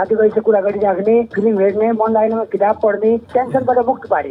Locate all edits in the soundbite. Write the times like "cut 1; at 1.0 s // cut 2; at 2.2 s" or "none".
cut 1; at 1.3 s // cut 2; at 3.3 s